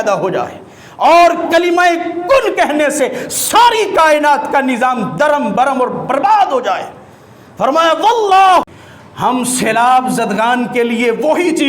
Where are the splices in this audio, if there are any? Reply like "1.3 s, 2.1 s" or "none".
8.6 s